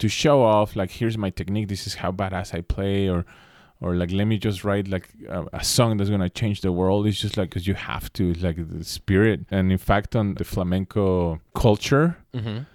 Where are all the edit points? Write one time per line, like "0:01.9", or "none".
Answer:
0:07.6
0:09.5
0:10.4
0:11.5

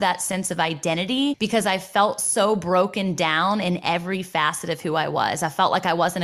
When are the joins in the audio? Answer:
none

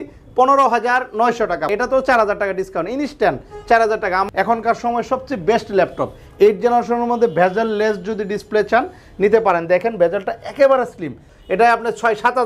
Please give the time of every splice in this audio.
0:01.7
0:04.2
0:11.2

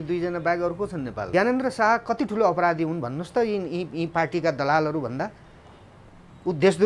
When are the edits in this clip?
0:01.2

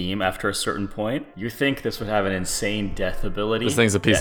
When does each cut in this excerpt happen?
0:01.3

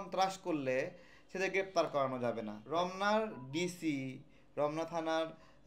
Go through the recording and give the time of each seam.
0:02.6

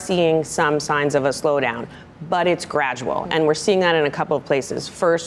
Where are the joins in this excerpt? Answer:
none

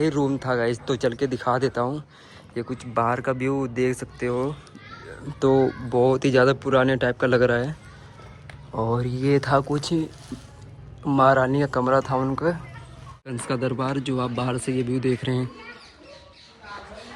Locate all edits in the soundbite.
0:13.4

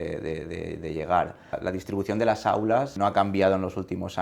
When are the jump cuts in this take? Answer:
0:01.6
0:02.9

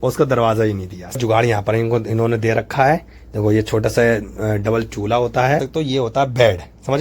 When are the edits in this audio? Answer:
0:01.2
0:05.6

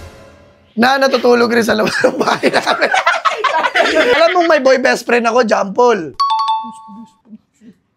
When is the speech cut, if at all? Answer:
none

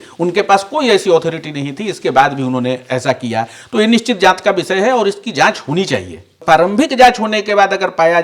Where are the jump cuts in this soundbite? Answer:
0:06.3

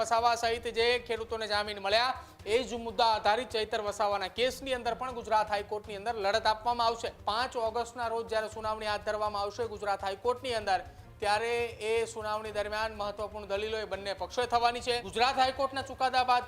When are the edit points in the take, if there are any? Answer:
0:07.1
0:15.1

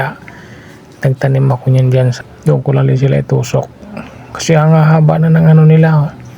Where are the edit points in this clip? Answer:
0:02.1

